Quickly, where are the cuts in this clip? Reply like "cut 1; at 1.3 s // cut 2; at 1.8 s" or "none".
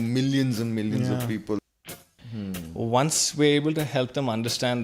cut 1; at 1.7 s